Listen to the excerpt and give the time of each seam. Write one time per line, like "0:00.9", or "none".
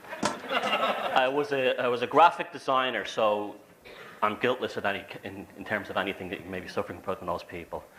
0:04.5